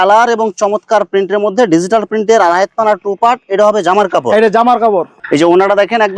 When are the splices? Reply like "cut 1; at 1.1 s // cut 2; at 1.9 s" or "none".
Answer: none